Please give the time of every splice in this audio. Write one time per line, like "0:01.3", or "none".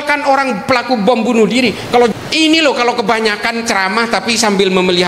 0:02.1

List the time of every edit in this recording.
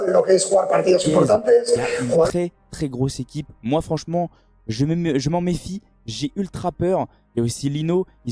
0:02.3

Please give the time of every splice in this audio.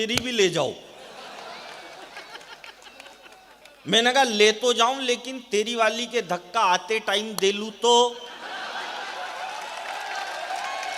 none

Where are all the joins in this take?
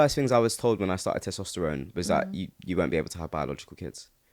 none

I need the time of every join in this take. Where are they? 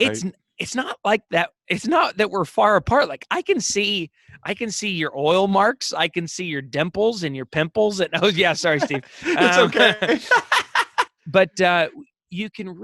0:11.2

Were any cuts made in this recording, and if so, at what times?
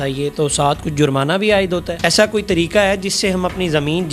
0:02.0

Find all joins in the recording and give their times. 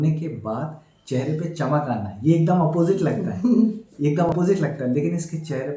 none

